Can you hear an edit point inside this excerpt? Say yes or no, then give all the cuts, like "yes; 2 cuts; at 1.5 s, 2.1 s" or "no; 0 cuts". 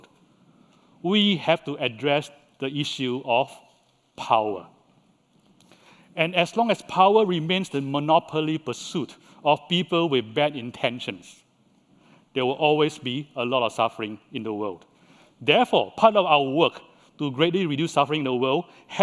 yes; 1 cut; at 17.2 s